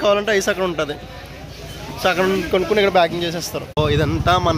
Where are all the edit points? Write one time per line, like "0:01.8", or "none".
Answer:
0:03.6